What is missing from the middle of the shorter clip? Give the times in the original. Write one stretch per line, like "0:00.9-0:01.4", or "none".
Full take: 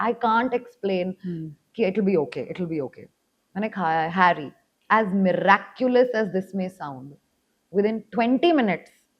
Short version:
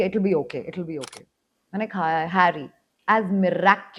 none